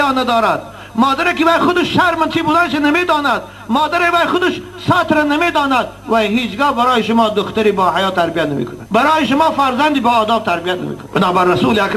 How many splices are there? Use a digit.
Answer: 0